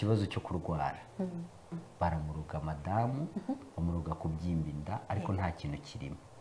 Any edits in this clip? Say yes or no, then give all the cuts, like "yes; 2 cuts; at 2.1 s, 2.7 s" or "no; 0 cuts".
yes; 1 cut; at 1.7 s